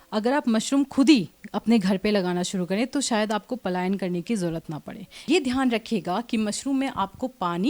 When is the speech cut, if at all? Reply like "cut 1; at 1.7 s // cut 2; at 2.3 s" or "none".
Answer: cut 1; at 5.2 s